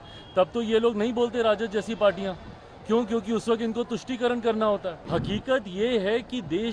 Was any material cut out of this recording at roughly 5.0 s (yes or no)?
yes